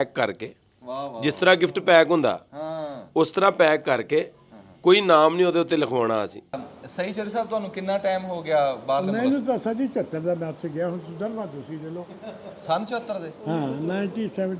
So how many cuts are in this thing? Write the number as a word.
one